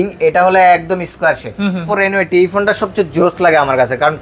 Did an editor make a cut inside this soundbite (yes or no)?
yes